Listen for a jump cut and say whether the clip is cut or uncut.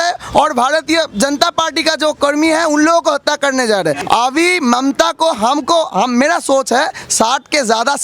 cut